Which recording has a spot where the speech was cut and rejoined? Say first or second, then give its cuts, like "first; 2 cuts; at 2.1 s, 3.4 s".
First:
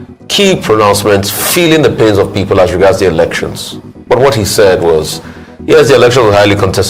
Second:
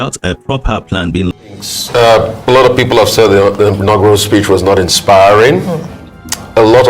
second; 1 cut; at 1.7 s